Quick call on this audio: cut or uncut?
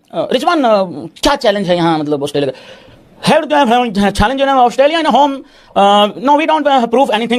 uncut